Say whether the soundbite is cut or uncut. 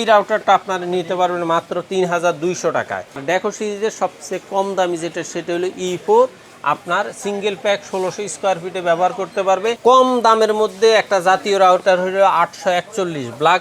cut